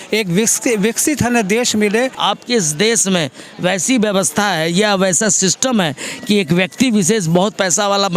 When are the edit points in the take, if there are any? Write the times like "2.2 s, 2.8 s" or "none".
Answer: 2.2 s